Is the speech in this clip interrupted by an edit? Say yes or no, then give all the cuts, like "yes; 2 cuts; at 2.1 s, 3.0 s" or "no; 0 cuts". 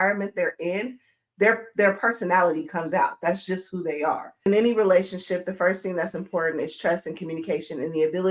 yes; 1 cut; at 4.5 s